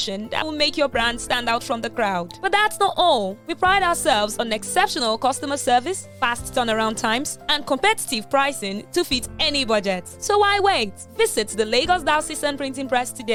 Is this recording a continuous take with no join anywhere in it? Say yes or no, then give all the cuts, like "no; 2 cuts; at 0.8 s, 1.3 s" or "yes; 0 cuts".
yes; 0 cuts